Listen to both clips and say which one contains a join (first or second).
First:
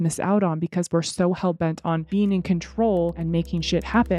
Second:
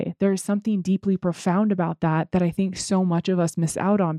first